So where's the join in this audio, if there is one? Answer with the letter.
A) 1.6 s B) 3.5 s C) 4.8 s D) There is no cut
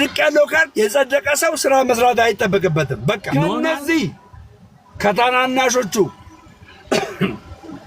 B